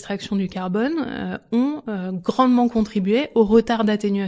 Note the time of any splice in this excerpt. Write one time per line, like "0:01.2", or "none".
none